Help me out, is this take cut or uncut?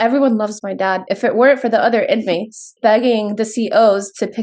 cut